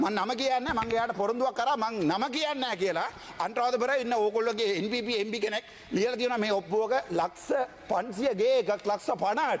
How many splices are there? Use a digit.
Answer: 0